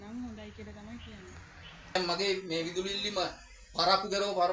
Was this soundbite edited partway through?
yes; 1 cut; at 2.0 s

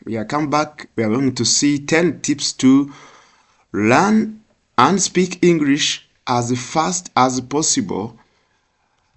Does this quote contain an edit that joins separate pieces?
no; 0 cuts

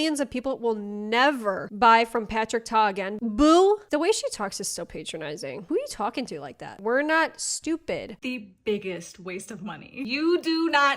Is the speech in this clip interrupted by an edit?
yes; 3 cuts; at 3.1 s, 3.8 s, 8.1 s

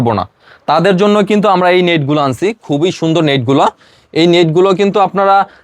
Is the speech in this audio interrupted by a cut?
no; 0 cuts

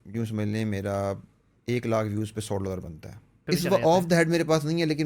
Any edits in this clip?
yes; 1 cut; at 3.4 s

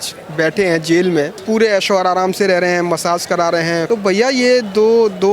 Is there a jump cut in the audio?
yes; 2 cuts; at 1.4 s, 3.8 s

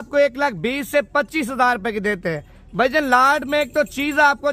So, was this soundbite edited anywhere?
no; 0 cuts

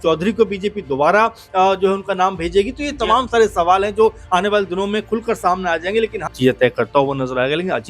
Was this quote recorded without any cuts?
no; 1 cut; at 6.3 s

